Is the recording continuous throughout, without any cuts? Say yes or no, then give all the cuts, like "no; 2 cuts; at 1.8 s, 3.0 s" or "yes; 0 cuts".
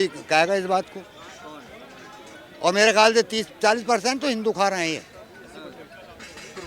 yes; 0 cuts